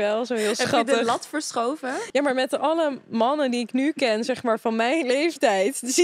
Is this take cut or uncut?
cut